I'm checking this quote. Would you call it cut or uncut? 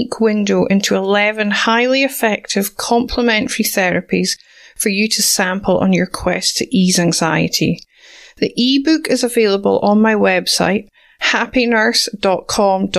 uncut